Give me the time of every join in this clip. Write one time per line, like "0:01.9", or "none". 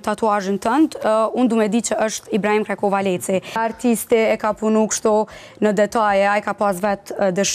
0:03.6